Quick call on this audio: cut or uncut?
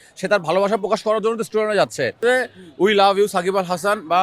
cut